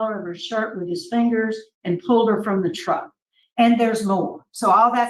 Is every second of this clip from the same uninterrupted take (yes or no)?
yes